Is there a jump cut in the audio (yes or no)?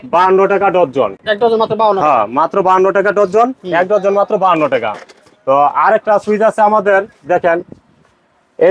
no